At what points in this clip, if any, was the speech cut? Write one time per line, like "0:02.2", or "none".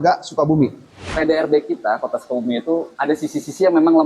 0:01.0
0:02.9